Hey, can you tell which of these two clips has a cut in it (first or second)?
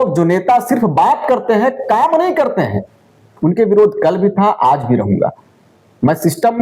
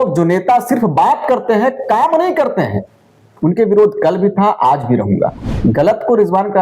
second